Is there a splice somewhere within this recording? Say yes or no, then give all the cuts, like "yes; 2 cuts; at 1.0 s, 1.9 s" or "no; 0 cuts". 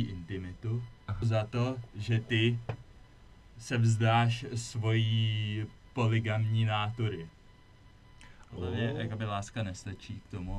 yes; 2 cuts; at 1.2 s, 8.8 s